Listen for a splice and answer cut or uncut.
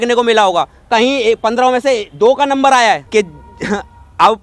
cut